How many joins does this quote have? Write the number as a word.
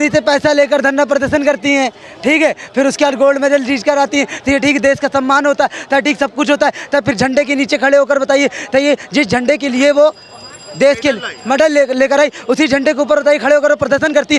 zero